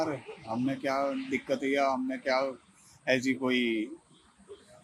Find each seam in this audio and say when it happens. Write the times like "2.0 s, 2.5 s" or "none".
none